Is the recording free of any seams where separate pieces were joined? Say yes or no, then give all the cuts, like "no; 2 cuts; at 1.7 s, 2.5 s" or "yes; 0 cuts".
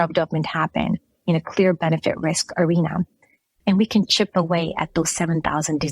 no; 1 cut; at 3.5 s